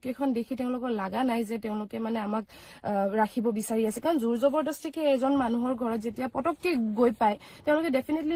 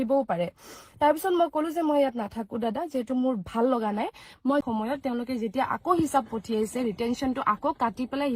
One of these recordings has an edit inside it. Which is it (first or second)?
second